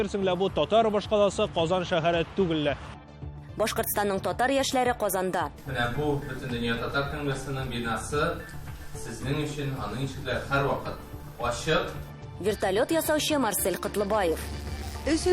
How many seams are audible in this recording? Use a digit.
1